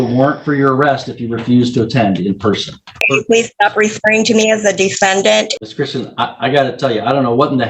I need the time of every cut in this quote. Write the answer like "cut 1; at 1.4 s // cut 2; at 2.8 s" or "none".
cut 1; at 3.0 s // cut 2; at 5.5 s